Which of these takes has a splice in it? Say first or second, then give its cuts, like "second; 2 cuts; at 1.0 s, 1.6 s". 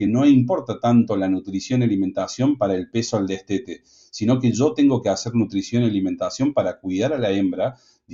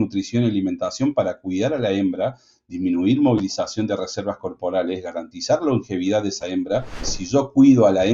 second; 1 cut; at 7.1 s